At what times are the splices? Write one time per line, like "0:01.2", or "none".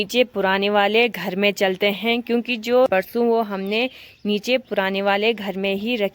0:02.9